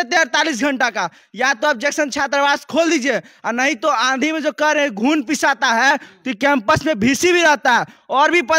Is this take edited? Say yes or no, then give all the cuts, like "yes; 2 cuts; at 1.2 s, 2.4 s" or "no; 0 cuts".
no; 0 cuts